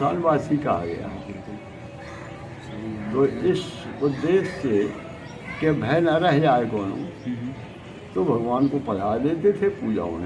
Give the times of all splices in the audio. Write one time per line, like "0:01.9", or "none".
none